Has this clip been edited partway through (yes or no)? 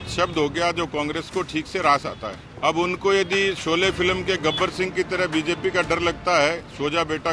yes